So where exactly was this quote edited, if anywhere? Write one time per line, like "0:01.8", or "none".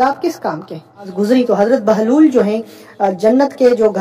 0:01.1